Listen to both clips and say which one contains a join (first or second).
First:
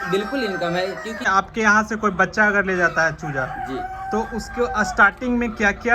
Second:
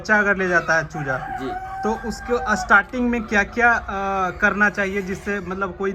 first